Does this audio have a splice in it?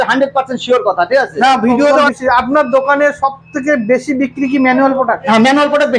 yes; 1 cut; at 2.1 s

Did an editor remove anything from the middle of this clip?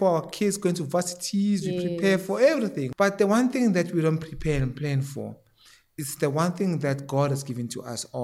yes; 1 cut; at 2.8 s

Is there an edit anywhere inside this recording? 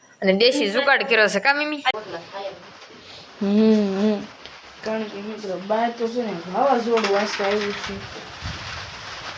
yes; 1 cut; at 1.9 s

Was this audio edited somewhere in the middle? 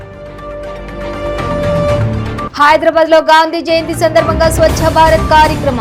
no; 0 cuts

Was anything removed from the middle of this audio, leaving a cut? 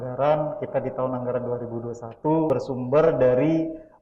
yes; 1 cut; at 2.5 s

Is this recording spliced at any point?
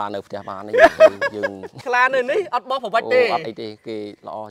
yes; 1 cut; at 1.7 s

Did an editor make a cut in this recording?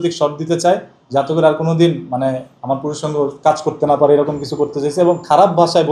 no; 0 cuts

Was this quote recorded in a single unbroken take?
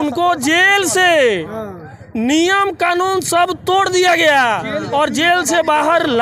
yes; 0 cuts

